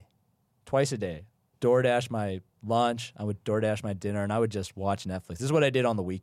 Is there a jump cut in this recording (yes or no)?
no